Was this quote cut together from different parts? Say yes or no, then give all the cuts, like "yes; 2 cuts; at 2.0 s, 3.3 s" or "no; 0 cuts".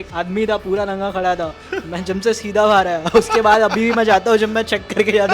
no; 0 cuts